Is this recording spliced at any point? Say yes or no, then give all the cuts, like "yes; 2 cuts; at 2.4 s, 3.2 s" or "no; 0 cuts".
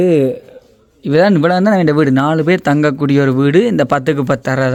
no; 0 cuts